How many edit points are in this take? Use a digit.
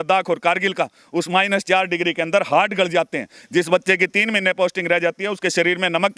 0